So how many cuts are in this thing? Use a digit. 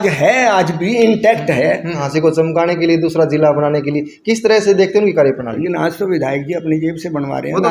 2